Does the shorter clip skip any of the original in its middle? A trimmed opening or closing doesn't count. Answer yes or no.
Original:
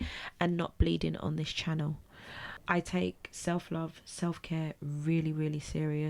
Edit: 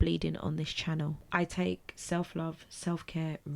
yes